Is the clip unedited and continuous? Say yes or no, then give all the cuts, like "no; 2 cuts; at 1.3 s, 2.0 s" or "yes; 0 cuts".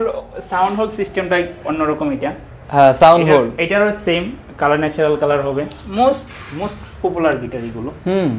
no; 1 cut; at 5.8 s